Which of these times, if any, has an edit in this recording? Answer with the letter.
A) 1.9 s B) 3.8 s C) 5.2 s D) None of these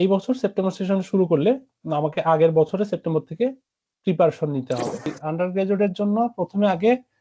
C